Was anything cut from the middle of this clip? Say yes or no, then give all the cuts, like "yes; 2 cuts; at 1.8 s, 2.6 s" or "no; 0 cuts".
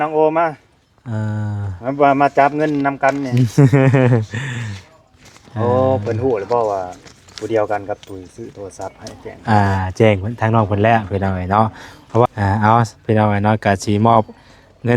yes; 1 cut; at 12.3 s